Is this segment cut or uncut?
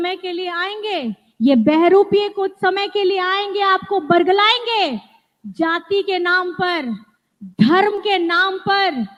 uncut